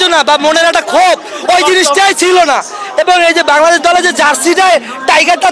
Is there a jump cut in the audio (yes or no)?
no